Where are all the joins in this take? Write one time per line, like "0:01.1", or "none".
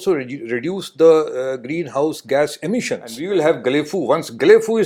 0:03.1